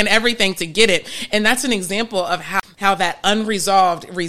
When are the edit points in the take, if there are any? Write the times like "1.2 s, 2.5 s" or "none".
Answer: 2.5 s